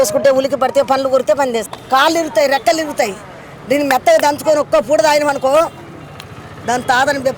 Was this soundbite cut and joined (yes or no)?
yes